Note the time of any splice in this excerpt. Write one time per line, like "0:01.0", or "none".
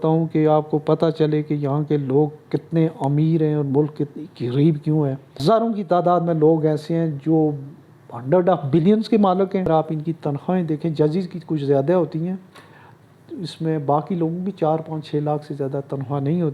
0:05.4
0:09.7